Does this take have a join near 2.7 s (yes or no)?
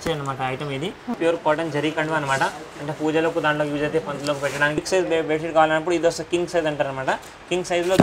no